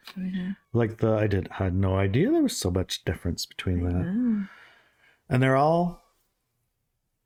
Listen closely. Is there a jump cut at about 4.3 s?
no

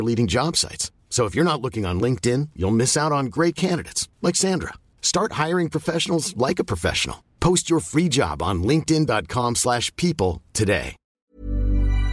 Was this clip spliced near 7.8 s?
no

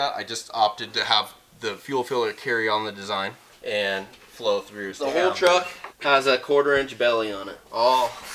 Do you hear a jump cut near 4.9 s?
yes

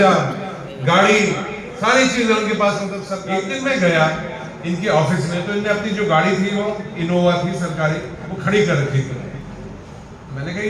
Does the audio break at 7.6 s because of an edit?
no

